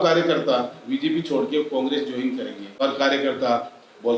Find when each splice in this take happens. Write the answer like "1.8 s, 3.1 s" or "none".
2.6 s